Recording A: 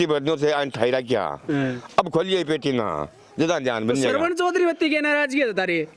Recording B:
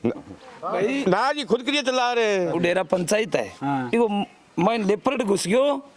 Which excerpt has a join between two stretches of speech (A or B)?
B